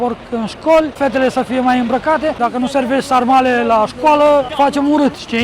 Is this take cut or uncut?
cut